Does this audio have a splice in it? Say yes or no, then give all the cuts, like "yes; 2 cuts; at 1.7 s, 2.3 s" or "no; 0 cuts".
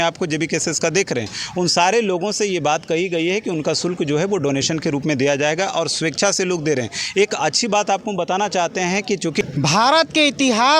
yes; 1 cut; at 9.4 s